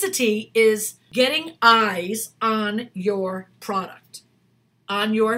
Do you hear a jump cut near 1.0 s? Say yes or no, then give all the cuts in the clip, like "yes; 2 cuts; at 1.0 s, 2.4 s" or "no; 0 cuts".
yes; 1 cut; at 1.0 s